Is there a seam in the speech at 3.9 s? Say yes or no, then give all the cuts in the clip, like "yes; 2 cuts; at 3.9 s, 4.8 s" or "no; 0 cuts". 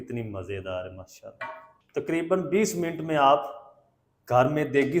no; 1 cut; at 1.7 s